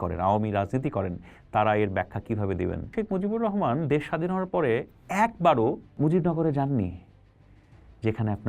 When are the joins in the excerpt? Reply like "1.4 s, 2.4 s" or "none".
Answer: 2.9 s, 5.9 s